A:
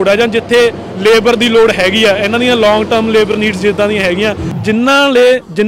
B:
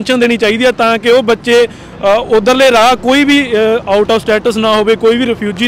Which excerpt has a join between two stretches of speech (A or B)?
A